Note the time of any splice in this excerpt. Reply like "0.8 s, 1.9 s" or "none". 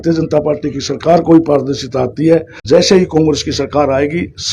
2.6 s